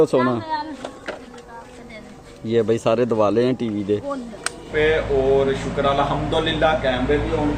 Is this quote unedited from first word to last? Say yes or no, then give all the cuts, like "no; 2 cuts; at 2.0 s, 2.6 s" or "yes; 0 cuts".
no; 1 cut; at 4.7 s